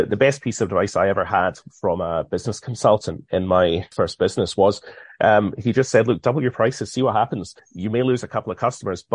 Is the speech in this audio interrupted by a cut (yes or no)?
yes